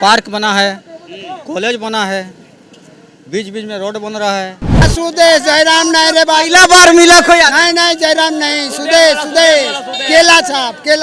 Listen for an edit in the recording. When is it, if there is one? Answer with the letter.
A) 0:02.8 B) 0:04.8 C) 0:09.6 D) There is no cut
B